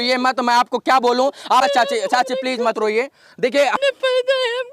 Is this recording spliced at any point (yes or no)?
yes